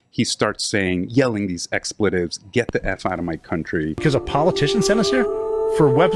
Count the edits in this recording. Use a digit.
1